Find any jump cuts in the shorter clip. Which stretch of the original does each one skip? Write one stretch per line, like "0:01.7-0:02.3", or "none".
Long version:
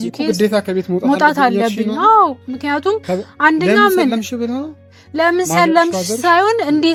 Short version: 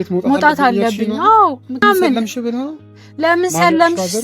0:02.6-0:03.8